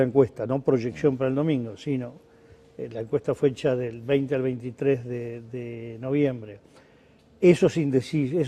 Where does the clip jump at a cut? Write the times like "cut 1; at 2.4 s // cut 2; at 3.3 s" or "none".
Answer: cut 1; at 5.0 s